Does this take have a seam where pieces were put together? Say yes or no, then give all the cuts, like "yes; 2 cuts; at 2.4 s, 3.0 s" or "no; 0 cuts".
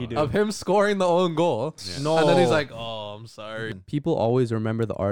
yes; 1 cut; at 3.7 s